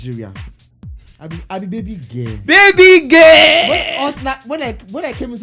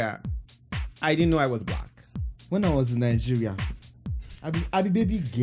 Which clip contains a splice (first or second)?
second